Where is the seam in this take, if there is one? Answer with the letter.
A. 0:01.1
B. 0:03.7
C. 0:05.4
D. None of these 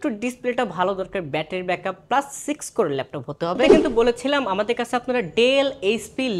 B